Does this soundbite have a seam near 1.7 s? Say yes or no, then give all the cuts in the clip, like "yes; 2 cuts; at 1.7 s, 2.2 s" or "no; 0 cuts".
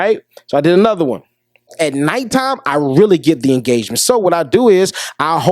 yes; 1 cut; at 1.7 s